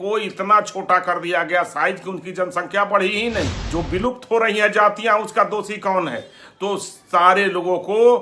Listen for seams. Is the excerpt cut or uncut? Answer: cut